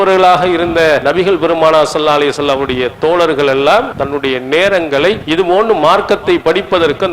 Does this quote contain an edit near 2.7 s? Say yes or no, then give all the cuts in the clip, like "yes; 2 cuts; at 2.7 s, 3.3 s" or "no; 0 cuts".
no; 3 cuts; at 1.0 s, 4.0 s, 5.2 s